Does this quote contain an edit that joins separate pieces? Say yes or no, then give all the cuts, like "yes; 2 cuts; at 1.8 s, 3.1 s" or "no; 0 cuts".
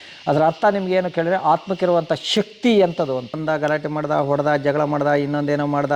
yes; 1 cut; at 3.4 s